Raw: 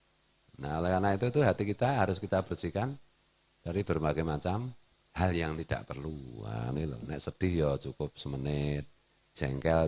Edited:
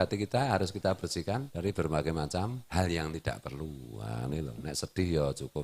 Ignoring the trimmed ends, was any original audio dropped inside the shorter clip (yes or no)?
yes